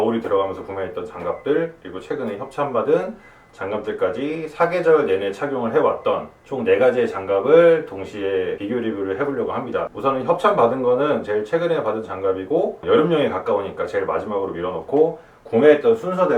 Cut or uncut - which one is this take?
uncut